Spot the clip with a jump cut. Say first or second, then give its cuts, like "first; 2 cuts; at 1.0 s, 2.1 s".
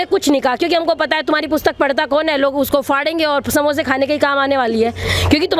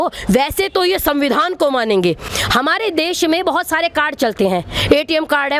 second; 1 cut; at 2.3 s